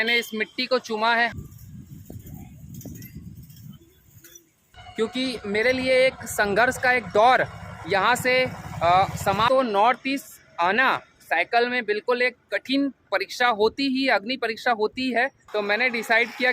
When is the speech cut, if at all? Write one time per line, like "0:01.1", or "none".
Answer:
0:01.3
0:04.8
0:09.5
0:15.4